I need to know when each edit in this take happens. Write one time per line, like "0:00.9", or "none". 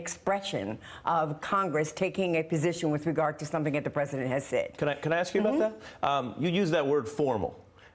0:03.2